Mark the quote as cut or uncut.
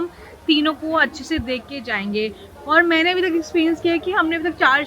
uncut